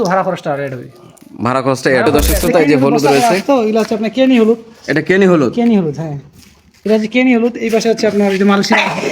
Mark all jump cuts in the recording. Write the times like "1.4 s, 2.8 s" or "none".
2.1 s